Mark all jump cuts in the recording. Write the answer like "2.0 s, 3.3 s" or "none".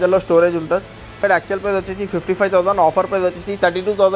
1.2 s